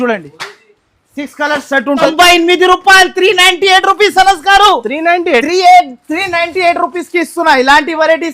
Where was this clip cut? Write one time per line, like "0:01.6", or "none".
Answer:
0:02.1